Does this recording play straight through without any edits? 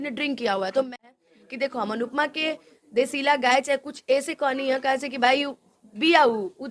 no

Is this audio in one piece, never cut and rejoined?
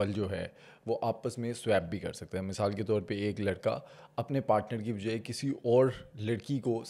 yes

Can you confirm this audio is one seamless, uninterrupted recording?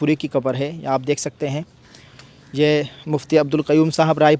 yes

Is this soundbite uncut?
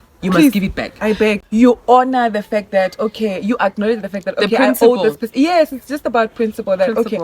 no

